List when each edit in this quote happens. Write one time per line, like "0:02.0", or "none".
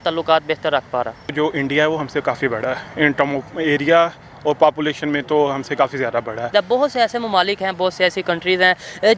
0:01.3
0:06.5